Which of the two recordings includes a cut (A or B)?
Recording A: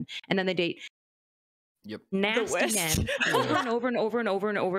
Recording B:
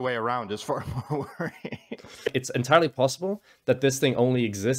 B